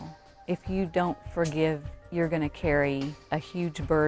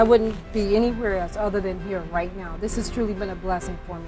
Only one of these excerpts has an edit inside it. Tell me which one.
first; 2 cuts; at 1.9 s, 3.2 s

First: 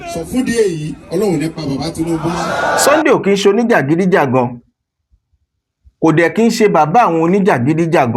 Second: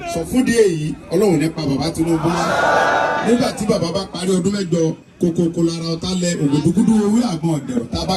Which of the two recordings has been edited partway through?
first; 1 cut; at 2.8 s

